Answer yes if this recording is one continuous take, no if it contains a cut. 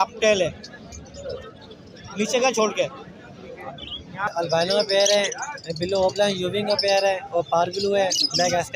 no